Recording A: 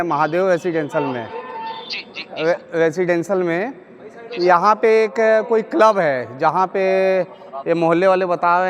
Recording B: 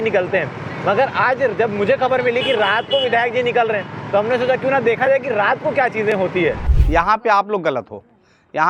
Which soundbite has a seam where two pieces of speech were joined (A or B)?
B